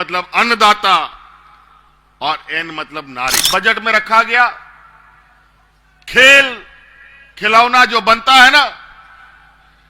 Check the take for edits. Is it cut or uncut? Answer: cut